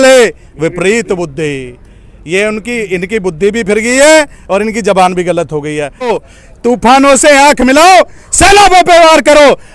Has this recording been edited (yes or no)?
yes